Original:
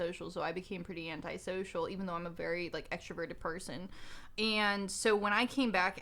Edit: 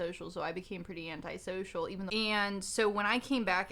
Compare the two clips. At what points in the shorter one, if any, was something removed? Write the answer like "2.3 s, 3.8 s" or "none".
2.1 s

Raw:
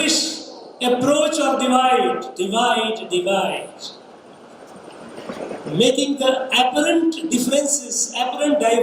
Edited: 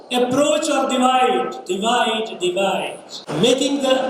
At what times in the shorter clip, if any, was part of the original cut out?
3.2 s

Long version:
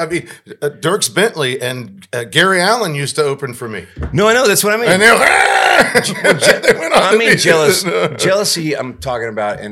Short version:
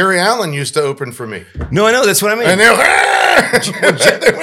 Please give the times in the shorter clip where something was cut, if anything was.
none

